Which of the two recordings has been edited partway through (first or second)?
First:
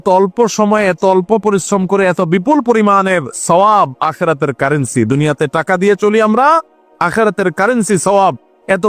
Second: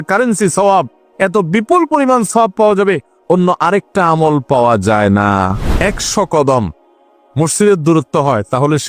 second